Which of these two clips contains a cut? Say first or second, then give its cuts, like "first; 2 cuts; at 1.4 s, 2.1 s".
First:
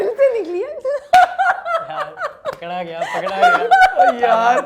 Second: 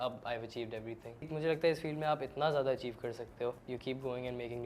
second; 2 cuts; at 1.3 s, 3.6 s